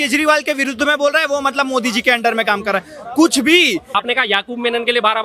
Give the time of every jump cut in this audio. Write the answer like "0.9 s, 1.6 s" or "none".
3.8 s